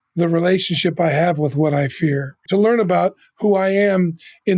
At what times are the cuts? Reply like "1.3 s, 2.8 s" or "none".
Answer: 2.4 s